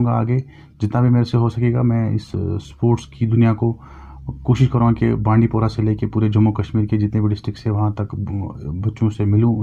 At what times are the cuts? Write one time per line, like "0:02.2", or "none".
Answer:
none